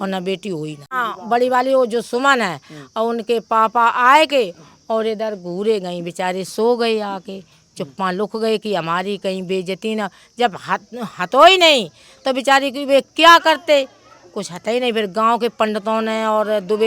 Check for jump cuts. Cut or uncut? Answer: cut